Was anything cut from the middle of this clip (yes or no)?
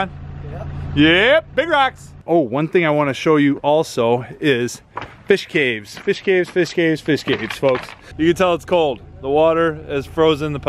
yes